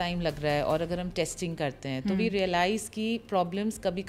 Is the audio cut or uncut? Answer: uncut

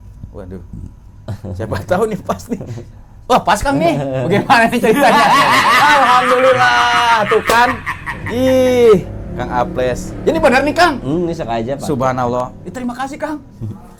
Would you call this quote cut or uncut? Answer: uncut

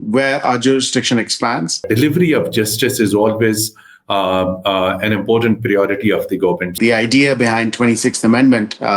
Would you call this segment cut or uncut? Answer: cut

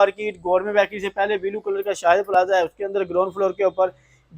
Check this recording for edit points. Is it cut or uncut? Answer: uncut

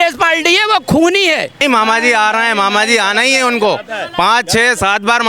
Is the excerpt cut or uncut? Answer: cut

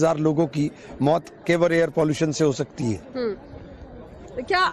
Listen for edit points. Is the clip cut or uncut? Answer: cut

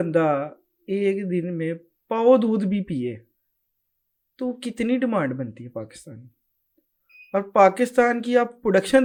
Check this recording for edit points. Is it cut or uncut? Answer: uncut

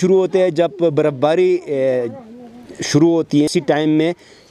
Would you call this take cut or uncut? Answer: uncut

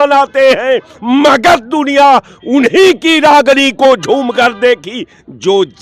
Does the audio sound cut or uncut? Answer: uncut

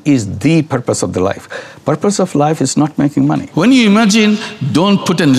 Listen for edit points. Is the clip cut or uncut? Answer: cut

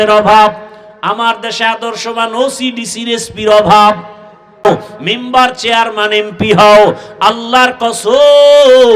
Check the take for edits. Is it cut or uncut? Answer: cut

